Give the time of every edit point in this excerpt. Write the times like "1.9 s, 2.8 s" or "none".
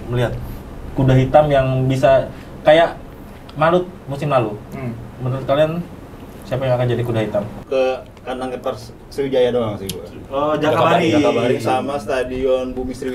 7.6 s